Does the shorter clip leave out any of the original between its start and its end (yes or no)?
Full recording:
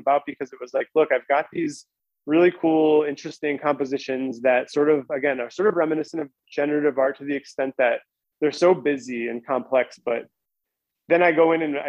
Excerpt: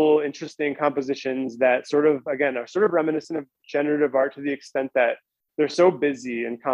no